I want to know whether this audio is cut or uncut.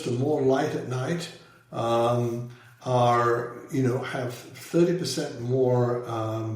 uncut